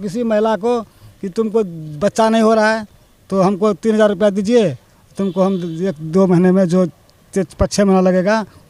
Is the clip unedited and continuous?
yes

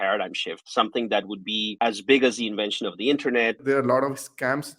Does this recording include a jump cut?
yes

